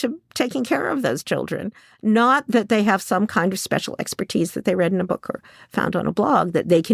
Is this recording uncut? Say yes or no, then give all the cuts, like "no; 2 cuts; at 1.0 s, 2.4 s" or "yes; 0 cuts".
yes; 0 cuts